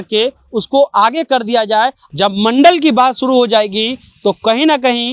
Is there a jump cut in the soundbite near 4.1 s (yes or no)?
no